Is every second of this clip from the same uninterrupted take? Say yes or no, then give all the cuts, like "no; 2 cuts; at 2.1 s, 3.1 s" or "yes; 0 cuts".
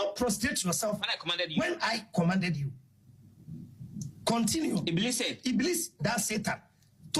yes; 0 cuts